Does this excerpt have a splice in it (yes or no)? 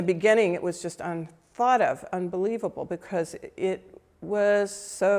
no